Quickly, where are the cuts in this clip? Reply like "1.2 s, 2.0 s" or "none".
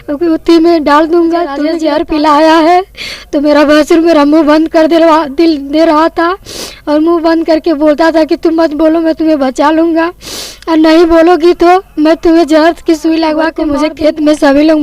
1.7 s, 13.6 s